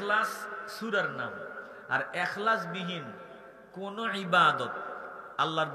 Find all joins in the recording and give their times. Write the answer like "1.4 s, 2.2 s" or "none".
none